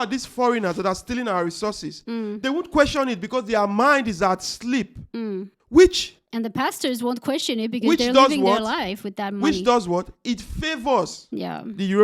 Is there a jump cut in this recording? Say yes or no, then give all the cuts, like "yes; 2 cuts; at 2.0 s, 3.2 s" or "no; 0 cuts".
no; 0 cuts